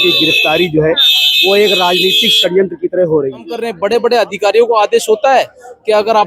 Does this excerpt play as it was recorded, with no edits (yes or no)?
no